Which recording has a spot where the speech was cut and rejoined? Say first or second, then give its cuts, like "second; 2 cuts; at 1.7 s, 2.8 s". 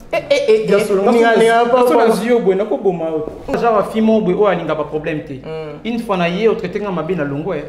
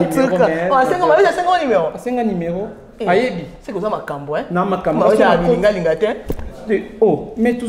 first; 1 cut; at 3.5 s